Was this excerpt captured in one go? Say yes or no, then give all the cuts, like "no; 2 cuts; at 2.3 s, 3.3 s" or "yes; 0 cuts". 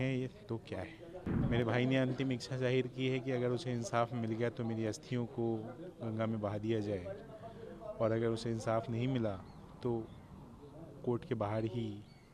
no; 1 cut; at 1.4 s